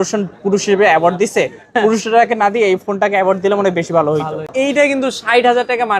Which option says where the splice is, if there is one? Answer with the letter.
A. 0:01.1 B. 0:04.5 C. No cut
B